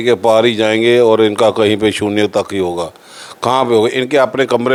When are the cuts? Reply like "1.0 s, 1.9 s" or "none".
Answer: none